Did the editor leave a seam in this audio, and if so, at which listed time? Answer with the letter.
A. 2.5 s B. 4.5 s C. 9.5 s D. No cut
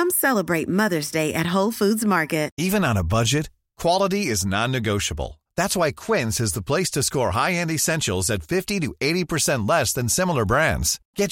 A